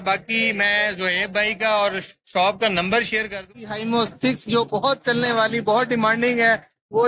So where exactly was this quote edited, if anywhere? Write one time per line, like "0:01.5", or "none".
0:03.5